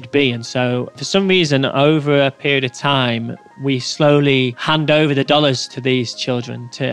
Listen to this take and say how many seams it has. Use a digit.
1